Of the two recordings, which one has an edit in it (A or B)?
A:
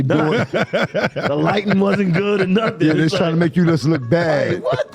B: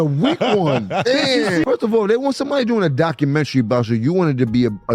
B